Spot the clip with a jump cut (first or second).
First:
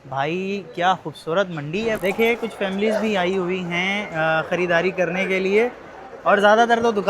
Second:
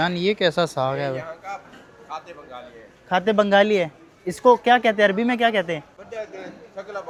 first